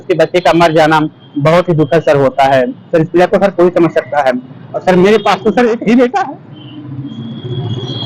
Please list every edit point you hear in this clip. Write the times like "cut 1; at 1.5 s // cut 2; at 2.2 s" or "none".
none